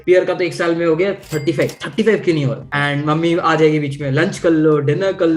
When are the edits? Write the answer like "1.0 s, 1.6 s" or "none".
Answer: 2.7 s